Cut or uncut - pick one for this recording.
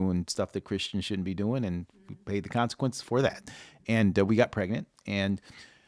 uncut